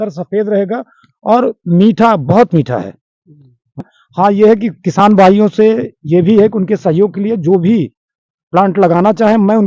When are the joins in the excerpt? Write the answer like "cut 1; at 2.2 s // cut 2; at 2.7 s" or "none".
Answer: cut 1; at 3.8 s